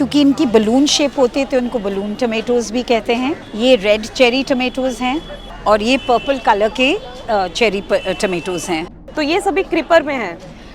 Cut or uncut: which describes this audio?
cut